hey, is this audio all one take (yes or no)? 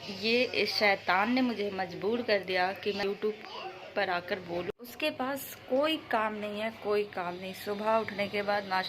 no